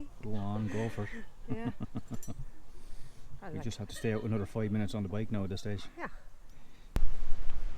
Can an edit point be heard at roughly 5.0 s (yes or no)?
no